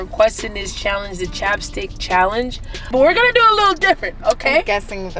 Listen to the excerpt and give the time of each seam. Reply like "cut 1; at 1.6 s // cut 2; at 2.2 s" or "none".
cut 1; at 2.9 s